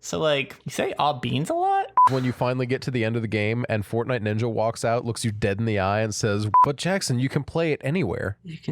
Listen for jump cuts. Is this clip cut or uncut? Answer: cut